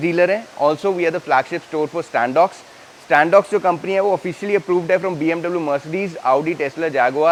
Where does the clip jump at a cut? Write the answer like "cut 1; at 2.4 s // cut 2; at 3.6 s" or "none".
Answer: none